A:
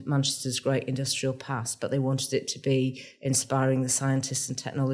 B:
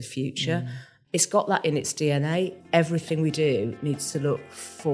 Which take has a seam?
B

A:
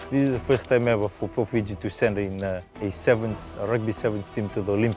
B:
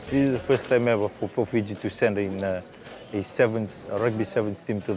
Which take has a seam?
A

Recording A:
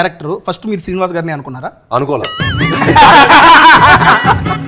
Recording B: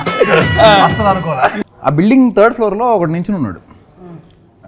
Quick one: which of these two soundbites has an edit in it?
B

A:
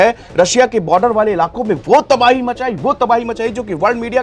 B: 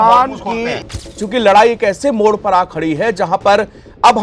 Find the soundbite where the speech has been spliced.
B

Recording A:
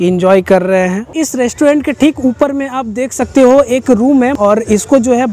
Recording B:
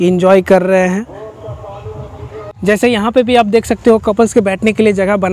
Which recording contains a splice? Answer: A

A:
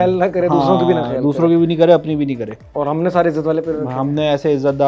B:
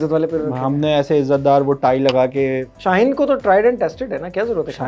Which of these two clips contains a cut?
B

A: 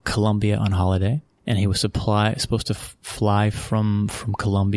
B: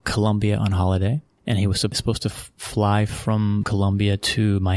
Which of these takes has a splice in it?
B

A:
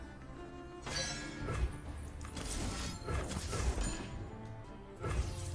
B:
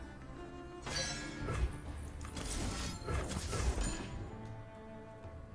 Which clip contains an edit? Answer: A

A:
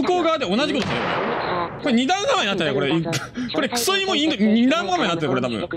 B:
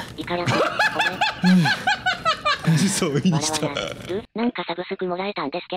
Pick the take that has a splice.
B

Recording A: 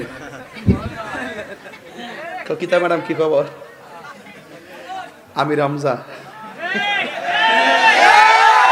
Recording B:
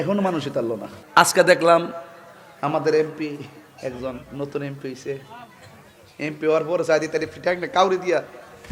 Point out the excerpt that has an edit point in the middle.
B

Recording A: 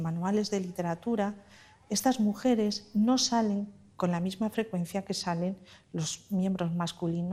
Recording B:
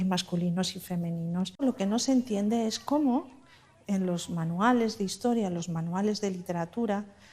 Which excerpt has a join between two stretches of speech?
B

